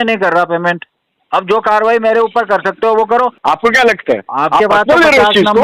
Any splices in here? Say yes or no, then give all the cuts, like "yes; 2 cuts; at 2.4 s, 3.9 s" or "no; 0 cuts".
yes; 1 cut; at 3.4 s